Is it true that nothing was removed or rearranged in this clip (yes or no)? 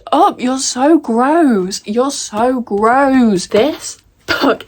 no